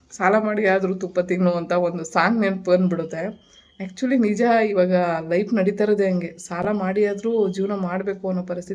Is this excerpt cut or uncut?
uncut